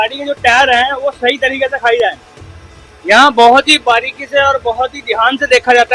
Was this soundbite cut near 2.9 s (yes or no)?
no